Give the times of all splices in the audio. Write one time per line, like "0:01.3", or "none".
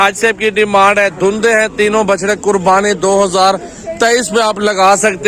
none

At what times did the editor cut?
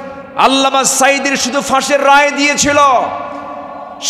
none

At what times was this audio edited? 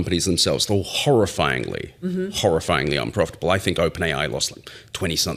none

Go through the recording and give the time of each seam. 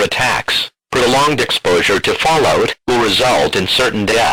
none

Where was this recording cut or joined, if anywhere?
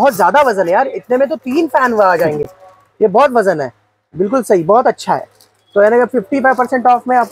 none

